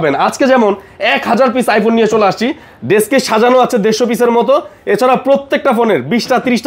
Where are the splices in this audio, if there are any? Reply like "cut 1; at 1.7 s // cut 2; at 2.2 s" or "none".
none